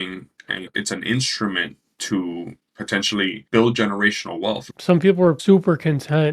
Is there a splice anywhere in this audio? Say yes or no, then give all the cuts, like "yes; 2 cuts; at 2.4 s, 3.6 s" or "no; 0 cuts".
yes; 2 cuts; at 3.4 s, 4.7 s